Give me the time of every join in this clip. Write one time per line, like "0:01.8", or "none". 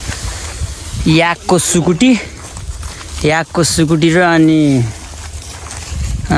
none